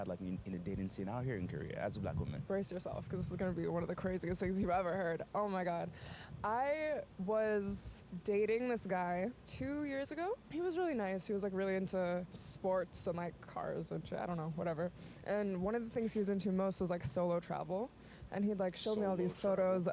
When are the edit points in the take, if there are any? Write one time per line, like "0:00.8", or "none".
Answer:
none